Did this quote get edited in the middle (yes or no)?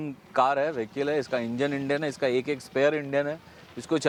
no